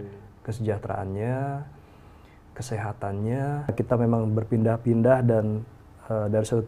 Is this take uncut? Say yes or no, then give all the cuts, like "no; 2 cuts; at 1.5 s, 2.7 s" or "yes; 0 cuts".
no; 1 cut; at 3.7 s